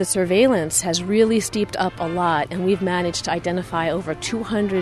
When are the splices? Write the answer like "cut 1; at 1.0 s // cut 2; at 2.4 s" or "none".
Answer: none